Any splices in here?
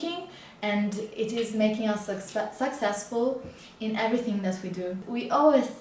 no; 0 cuts

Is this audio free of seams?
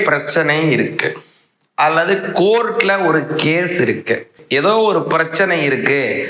no; 1 cut; at 4.4 s

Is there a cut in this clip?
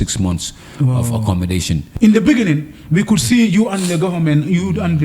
yes; 1 cut; at 1.9 s

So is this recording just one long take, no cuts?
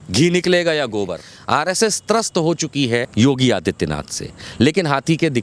no; 2 cuts; at 1.3 s, 3.1 s

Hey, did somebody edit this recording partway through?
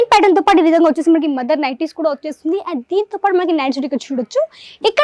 no; 0 cuts

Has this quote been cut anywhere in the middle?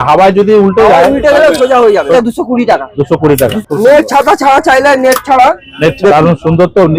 yes; 3 cuts; at 2.1 s, 3.6 s, 6.0 s

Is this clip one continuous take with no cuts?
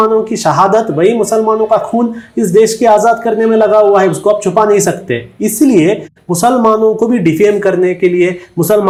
yes; 0 cuts

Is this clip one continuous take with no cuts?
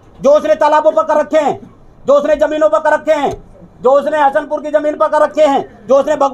yes; 0 cuts

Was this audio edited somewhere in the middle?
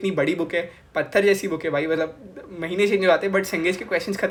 no; 0 cuts

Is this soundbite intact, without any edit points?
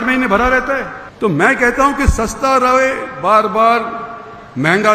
no; 1 cut; at 1.0 s

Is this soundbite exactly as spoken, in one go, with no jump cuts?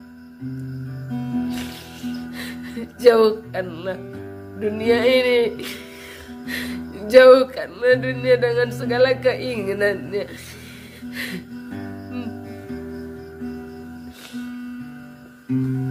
yes; 0 cuts

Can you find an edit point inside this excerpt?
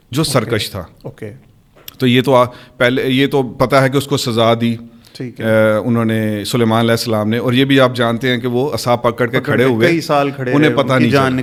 no; 0 cuts

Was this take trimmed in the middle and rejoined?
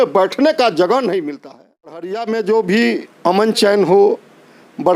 yes; 1 cut; at 1.9 s

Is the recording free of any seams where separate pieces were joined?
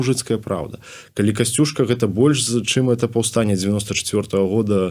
yes; 0 cuts

